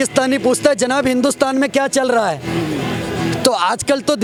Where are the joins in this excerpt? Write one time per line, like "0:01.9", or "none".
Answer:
none